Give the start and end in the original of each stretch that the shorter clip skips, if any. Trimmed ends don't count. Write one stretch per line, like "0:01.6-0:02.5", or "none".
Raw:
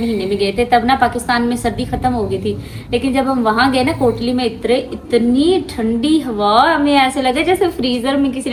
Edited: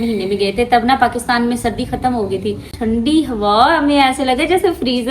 0:02.7-0:05.7

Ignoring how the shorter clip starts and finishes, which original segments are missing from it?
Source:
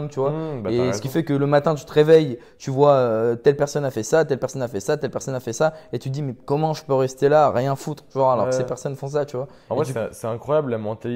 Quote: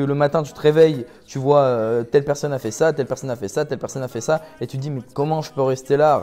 none

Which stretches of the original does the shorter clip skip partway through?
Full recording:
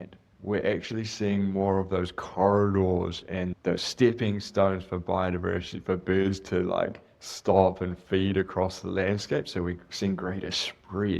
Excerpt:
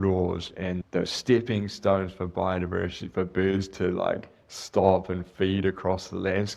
none

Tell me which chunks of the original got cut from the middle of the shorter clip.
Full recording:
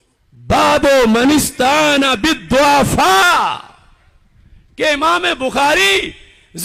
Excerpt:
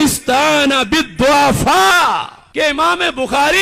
0:03.7-0:04.6

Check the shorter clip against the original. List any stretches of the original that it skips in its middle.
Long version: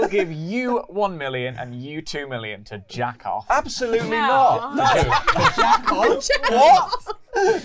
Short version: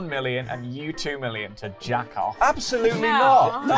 none

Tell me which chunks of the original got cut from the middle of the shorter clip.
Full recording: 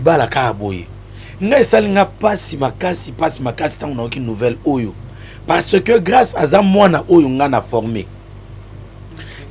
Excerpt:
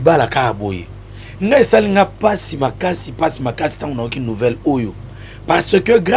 none

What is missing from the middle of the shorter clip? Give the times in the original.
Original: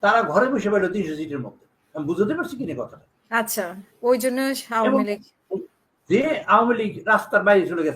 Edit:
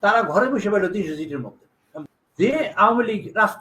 0:02.0-0:05.7

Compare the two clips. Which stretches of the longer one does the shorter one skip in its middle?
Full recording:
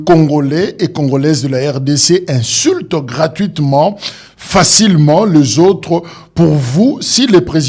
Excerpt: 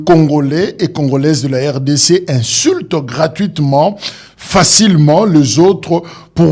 none

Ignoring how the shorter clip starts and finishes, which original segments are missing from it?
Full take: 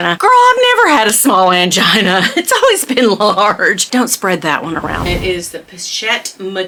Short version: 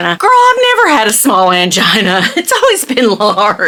none

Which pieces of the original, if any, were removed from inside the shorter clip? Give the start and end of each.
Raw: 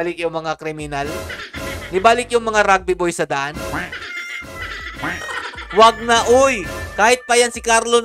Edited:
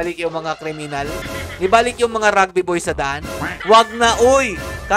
0:01.2-0:01.6
0:03.8-0:05.5

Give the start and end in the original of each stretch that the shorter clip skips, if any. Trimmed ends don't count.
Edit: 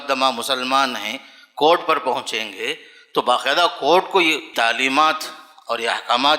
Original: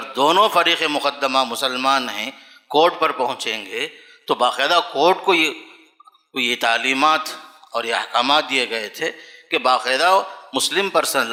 0:05.6-0:06.5

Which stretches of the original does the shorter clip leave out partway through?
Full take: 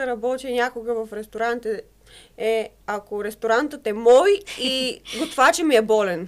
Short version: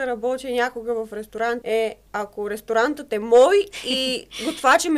0:01.6-0:02.3

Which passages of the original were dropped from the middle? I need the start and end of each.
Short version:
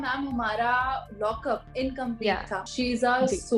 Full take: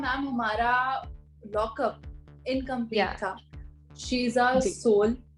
0:01.4-0:02.1
0:03.4-0:04.0

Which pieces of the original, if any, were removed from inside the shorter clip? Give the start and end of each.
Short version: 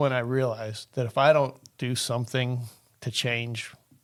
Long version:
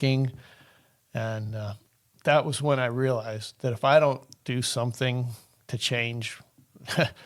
none

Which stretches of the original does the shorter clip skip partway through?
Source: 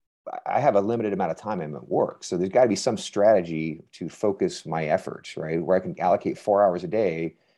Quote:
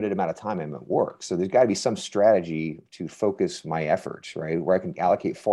none

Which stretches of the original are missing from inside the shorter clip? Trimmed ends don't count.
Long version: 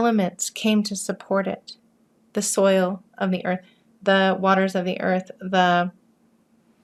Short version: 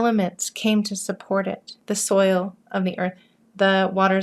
0:01.7-0:02.2

